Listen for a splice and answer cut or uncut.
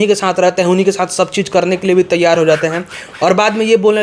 uncut